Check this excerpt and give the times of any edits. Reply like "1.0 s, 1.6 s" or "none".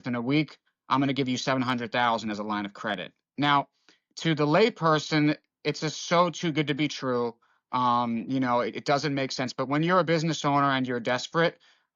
none